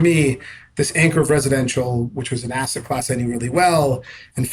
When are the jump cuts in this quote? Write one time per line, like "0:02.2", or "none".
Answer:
none